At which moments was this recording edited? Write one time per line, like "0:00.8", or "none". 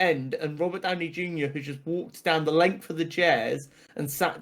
none